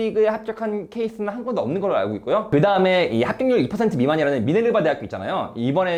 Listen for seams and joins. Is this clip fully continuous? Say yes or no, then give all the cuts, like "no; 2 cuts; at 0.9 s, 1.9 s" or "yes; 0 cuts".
yes; 0 cuts